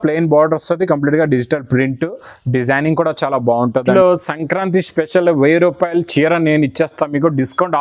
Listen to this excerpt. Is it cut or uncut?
cut